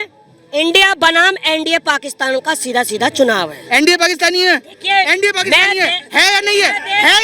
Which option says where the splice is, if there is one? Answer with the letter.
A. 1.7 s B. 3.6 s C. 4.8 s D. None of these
B